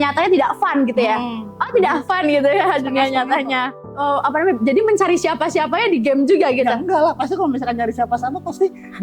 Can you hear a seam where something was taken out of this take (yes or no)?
yes